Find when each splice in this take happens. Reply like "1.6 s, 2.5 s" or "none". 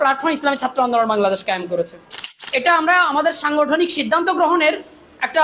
2.3 s